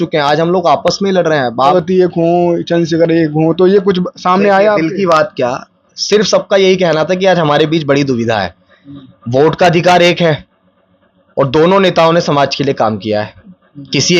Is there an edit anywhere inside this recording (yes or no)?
yes